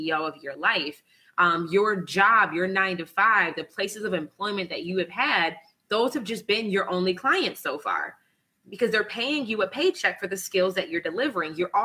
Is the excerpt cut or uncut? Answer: uncut